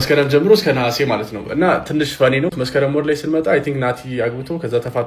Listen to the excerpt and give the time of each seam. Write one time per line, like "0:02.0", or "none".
0:02.5